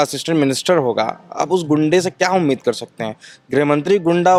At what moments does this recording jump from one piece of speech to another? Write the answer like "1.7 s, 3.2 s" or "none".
none